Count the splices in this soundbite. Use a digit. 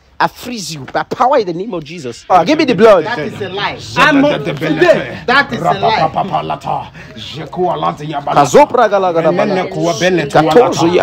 1